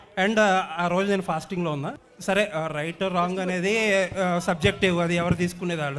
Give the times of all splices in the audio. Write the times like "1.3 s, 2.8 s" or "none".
2.0 s